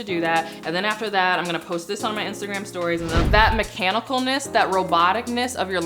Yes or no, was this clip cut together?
yes